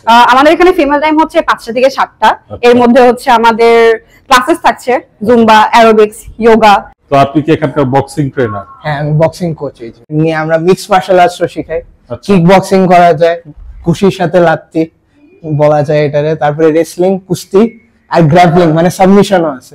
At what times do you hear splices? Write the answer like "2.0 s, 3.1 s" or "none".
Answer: 6.9 s, 10.1 s